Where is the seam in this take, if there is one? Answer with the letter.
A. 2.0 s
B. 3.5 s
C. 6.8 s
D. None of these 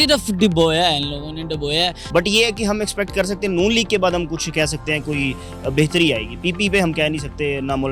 A